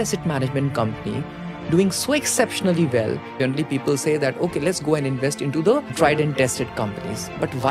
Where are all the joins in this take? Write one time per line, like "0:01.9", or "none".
0:03.3
0:05.9